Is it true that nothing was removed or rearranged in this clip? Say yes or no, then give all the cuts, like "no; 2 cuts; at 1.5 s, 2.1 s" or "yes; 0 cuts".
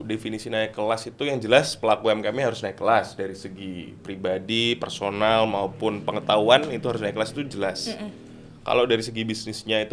yes; 0 cuts